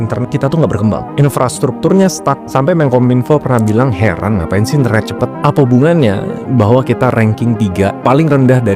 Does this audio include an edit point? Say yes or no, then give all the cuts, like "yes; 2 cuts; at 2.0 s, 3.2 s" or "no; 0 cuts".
no; 0 cuts